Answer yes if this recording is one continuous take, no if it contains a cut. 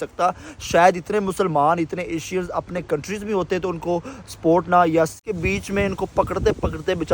no